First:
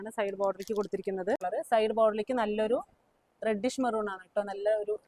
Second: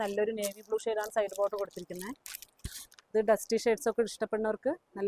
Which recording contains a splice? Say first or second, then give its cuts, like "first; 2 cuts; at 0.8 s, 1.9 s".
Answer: first; 1 cut; at 1.4 s